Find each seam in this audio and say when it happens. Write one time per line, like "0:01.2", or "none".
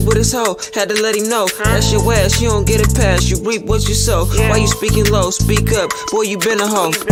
none